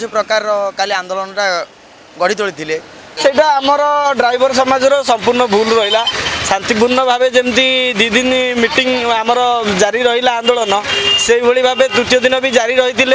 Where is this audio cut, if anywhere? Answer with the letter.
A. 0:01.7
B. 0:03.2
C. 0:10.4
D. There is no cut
B